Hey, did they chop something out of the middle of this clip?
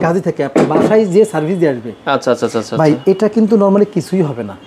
no; 0 cuts

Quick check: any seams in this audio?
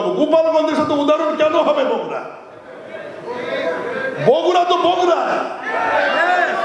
no; 0 cuts

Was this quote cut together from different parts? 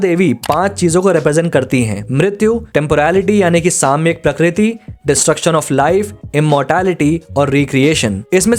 no; 0 cuts

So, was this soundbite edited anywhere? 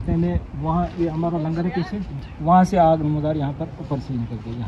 no; 0 cuts

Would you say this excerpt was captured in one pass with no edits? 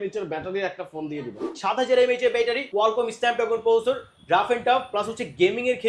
no; 2 cuts; at 1.4 s, 2.6 s

